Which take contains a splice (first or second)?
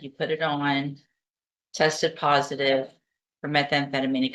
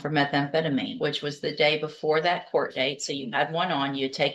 second